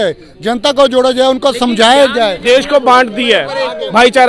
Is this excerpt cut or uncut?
cut